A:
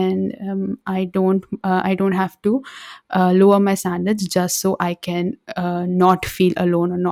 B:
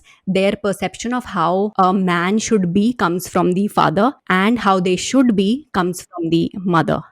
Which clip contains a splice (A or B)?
B